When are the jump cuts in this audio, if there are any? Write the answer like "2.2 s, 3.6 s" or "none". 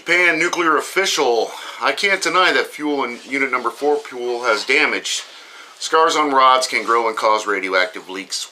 2.7 s